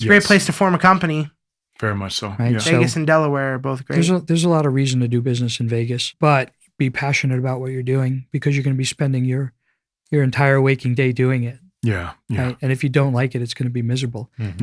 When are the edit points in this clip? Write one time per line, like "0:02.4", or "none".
0:06.0